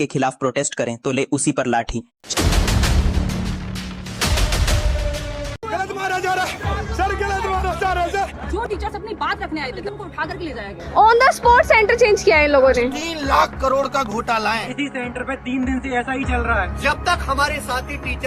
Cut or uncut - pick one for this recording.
uncut